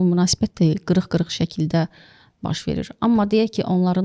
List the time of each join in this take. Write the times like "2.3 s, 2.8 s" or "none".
none

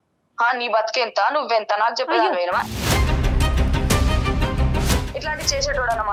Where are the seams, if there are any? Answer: none

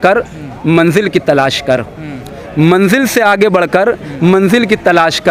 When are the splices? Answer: none

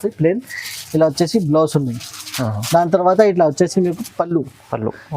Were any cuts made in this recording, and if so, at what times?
none

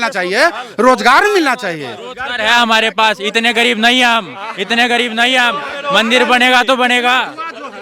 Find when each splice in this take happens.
none

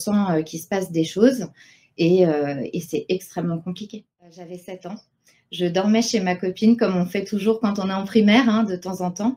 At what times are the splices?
4.4 s

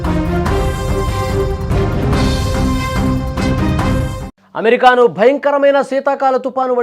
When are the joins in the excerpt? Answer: 3.1 s

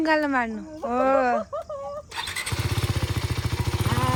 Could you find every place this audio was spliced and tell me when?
none

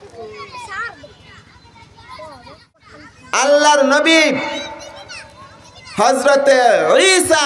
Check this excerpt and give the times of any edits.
2.8 s

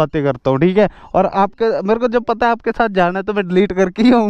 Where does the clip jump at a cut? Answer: none

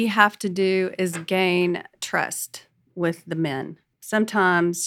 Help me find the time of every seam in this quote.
3.9 s

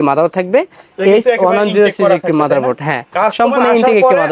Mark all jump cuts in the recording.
none

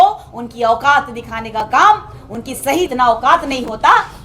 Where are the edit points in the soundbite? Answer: 2.9 s

